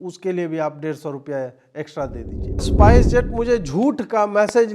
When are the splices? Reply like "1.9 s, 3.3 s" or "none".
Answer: 2.7 s